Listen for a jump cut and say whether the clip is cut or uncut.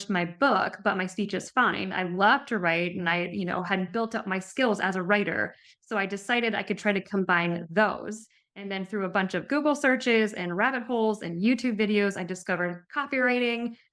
cut